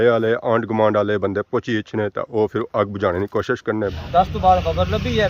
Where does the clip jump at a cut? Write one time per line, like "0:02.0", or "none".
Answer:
0:04.0